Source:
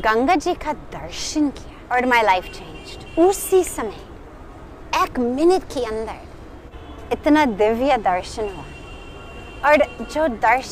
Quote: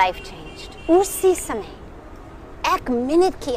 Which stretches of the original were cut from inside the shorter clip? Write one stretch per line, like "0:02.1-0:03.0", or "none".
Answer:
none